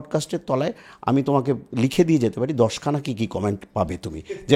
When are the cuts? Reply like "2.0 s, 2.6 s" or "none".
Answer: none